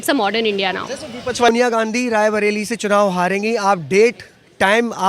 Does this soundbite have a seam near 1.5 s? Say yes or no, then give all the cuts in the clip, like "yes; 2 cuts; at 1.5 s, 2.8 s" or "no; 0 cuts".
yes; 1 cut; at 1.5 s